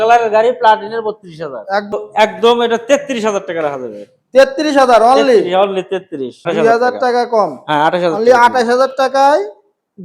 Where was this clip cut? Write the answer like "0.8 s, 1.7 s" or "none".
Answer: 1.9 s, 6.5 s